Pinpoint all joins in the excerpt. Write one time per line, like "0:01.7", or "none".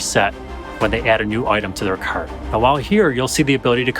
0:02.4

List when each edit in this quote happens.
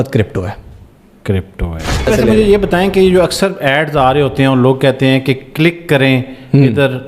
0:02.1

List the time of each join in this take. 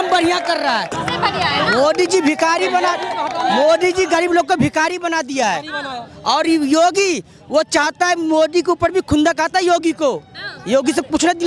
0:01.0

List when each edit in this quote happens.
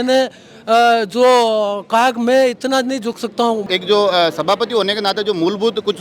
0:03.6

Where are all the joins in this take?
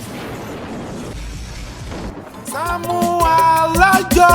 0:02.7

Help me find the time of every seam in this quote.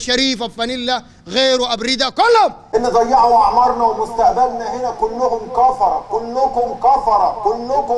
0:02.6

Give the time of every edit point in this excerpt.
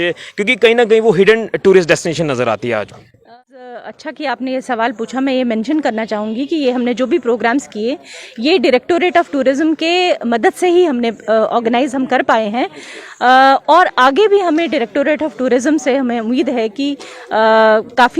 0:03.2

